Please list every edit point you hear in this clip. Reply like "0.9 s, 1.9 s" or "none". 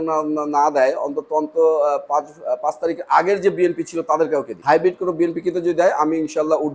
4.5 s